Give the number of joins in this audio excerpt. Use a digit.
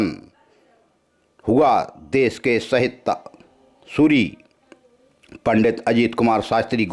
0